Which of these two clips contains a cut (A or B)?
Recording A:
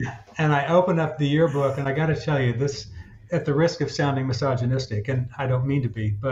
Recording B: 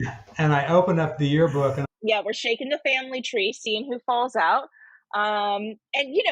B